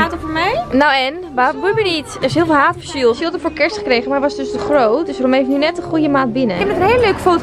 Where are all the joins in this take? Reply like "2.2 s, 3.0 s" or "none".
3.2 s, 6.6 s